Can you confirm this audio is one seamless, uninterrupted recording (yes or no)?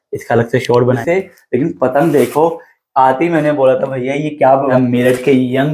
no